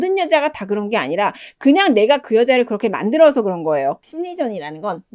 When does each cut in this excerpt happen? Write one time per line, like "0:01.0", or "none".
0:04.1